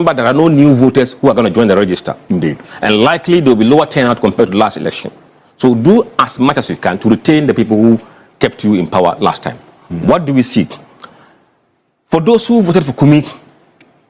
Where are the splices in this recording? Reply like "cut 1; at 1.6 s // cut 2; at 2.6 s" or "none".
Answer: none